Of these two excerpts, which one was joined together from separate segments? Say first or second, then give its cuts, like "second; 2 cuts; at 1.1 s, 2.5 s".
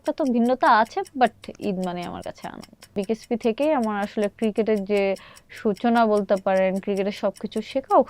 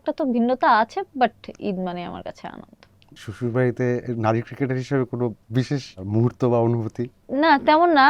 first; 1 cut; at 3.0 s